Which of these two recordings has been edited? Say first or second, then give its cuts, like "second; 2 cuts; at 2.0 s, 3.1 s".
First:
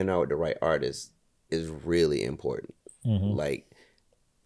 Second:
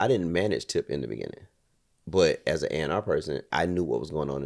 second; 1 cut; at 3.5 s